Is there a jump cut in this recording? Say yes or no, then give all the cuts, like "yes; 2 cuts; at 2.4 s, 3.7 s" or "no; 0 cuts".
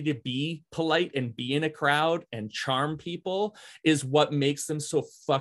no; 0 cuts